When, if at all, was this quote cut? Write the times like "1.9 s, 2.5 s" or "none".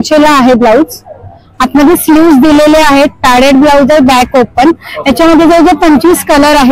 none